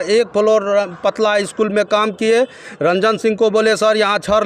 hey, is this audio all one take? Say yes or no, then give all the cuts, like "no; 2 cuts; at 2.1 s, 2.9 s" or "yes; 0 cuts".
yes; 0 cuts